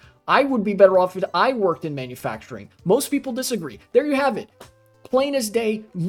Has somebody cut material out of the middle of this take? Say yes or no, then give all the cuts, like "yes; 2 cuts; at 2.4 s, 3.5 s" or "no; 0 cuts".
no; 0 cuts